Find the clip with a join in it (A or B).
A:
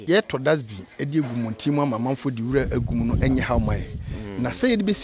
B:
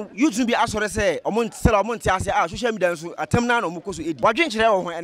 B